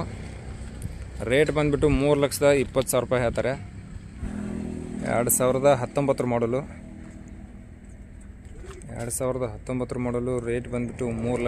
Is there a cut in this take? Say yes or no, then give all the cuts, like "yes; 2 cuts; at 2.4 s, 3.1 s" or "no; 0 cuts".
yes; 1 cut; at 4.2 s